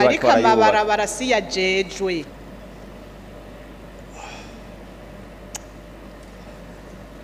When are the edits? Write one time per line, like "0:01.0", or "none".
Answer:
0:02.3